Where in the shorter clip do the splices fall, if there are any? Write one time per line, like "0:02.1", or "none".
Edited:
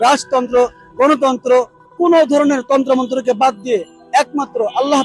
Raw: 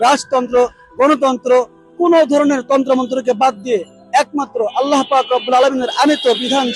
none